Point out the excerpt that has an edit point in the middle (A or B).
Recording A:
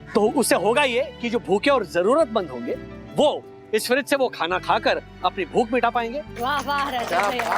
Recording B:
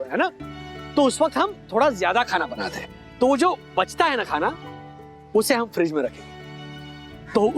A